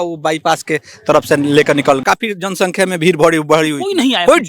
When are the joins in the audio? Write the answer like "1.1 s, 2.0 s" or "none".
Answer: 2.0 s